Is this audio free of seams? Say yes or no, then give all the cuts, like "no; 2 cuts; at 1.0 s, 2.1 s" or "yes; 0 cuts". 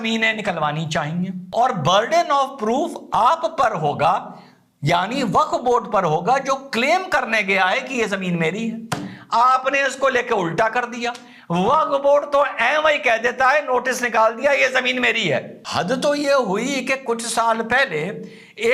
no; 2 cuts; at 1.4 s, 15.6 s